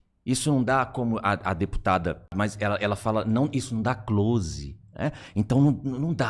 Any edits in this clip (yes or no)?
yes